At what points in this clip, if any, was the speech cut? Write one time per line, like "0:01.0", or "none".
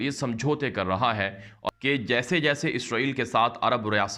0:01.5